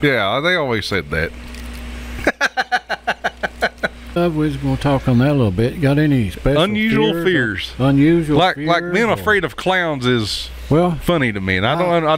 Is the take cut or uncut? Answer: cut